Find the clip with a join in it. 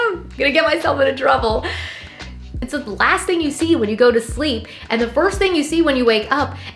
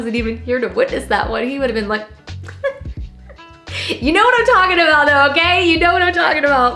first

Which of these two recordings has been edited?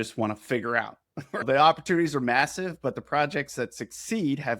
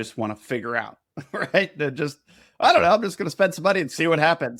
first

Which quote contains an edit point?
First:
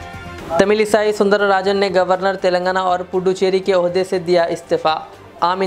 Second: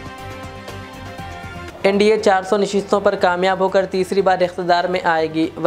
second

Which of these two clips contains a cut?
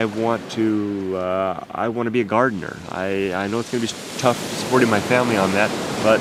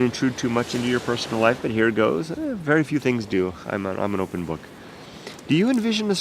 second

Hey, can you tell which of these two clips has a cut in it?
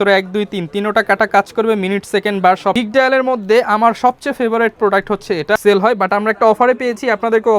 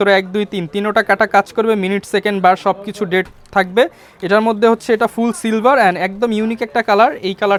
first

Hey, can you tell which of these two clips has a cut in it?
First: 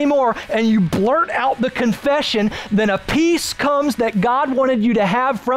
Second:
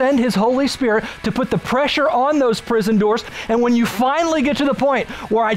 second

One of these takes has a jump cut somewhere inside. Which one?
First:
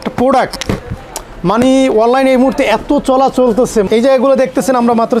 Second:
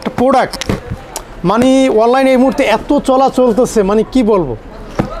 first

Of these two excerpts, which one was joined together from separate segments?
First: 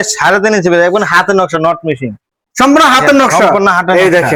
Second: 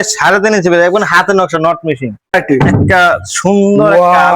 second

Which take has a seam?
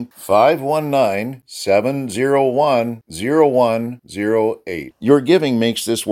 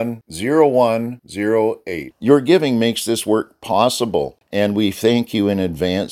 second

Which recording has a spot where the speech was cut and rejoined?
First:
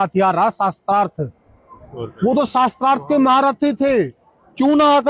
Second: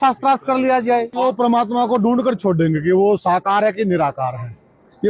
second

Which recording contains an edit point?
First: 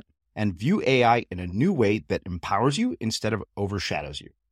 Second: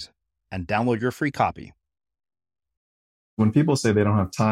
second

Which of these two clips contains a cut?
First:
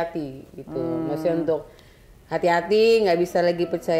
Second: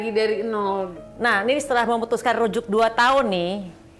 second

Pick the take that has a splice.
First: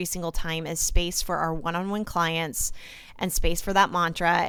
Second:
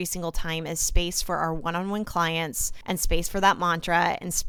second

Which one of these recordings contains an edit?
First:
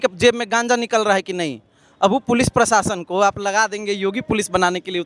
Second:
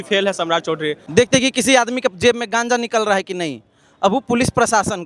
second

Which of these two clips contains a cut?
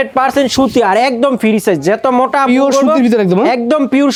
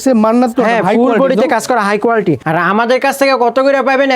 second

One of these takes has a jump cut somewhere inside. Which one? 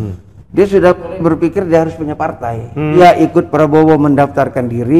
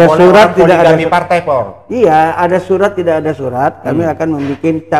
first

